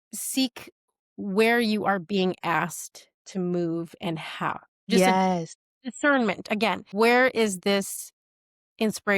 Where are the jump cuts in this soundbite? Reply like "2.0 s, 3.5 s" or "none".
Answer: 4.9 s, 6.9 s